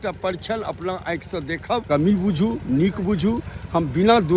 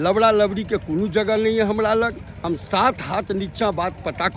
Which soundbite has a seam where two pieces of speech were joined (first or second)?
first